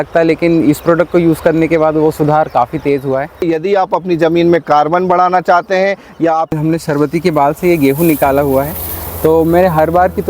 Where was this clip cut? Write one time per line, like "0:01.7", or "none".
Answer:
0:03.4
0:06.5